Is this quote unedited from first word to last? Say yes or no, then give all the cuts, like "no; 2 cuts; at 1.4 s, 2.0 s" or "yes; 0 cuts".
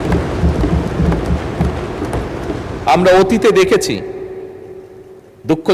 yes; 0 cuts